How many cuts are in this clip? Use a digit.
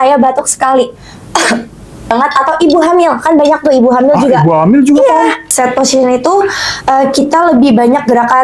2